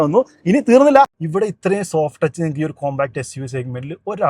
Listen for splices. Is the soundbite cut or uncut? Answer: cut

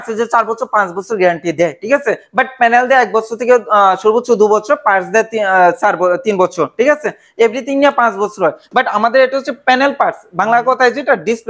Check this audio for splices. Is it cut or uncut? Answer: uncut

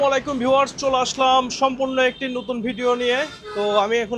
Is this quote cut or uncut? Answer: uncut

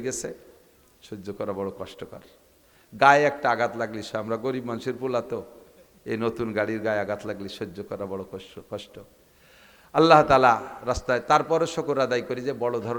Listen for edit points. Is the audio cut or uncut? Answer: uncut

